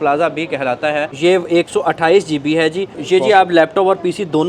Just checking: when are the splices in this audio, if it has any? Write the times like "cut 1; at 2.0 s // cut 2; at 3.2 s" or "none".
cut 1; at 1.1 s // cut 2; at 2.9 s